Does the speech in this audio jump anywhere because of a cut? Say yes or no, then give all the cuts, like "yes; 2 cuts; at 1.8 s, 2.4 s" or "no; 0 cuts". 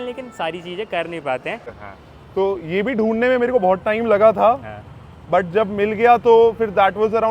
yes; 1 cut; at 1.8 s